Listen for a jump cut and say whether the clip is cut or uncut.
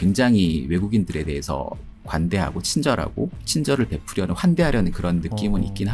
cut